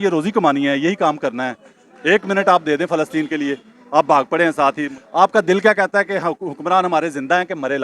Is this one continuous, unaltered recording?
yes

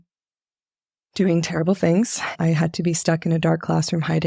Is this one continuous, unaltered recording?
no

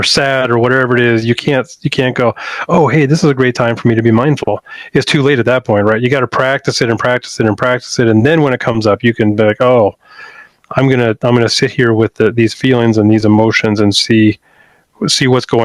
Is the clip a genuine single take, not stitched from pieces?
yes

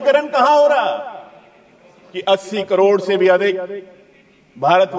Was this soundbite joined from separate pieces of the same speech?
yes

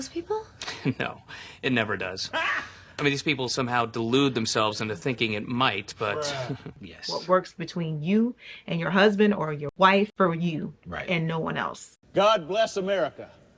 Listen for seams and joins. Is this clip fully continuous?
no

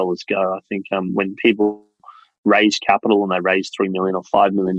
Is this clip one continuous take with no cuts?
no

